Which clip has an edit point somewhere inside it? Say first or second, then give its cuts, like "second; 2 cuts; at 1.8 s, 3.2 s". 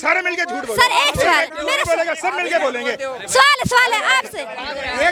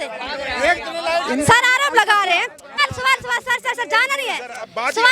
second; 1 cut; at 2.8 s